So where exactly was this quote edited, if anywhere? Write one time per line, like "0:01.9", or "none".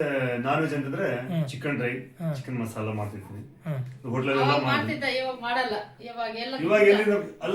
none